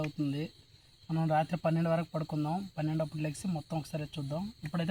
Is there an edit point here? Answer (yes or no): no